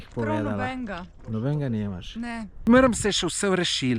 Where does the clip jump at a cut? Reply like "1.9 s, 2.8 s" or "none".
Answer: 2.7 s